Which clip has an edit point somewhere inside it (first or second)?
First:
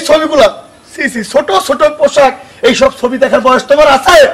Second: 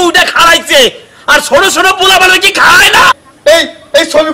second